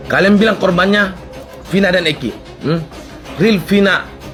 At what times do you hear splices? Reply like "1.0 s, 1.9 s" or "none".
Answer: none